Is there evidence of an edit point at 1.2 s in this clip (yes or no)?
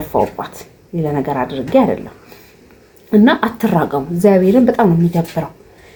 no